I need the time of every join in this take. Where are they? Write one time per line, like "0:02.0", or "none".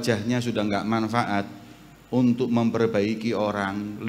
none

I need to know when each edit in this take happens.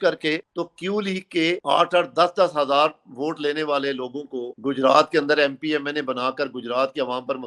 none

